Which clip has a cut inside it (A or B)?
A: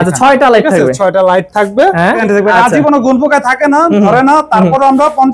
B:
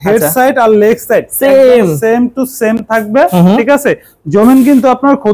A